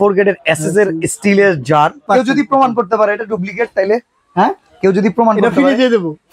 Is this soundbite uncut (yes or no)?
no